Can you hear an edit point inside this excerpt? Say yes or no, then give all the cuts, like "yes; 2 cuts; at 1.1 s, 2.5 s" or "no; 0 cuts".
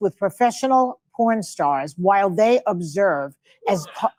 no; 0 cuts